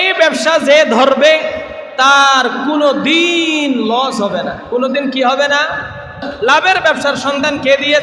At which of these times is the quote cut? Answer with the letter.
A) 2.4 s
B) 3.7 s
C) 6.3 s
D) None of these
C